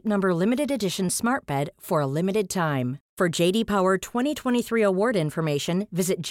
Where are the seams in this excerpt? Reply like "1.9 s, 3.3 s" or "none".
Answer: none